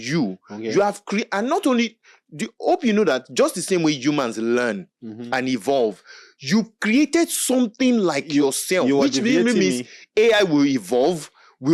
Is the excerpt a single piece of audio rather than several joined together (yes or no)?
yes